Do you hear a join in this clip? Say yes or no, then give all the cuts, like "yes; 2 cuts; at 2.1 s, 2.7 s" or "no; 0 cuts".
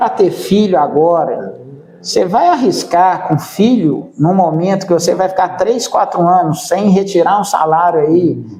no; 0 cuts